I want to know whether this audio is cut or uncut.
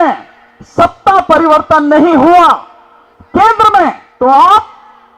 cut